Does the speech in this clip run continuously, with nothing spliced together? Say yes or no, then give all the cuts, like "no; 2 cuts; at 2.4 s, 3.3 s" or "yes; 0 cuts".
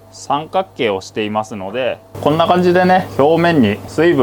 no; 1 cut; at 2.1 s